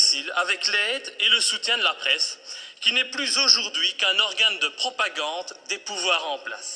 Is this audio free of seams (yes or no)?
yes